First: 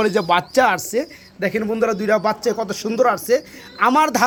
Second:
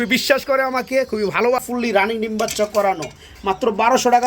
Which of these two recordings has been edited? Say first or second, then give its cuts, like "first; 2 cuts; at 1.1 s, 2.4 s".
second; 1 cut; at 1.6 s